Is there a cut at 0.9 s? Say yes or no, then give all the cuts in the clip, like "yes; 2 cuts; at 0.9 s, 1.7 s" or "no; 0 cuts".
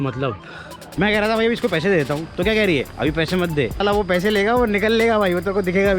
yes; 2 cuts; at 0.9 s, 3.8 s